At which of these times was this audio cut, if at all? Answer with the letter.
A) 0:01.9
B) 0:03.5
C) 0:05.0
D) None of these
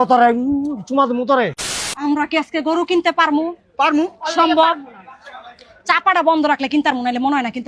A